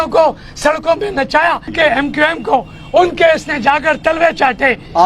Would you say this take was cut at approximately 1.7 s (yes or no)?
yes